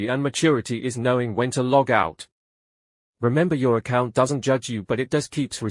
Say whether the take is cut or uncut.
uncut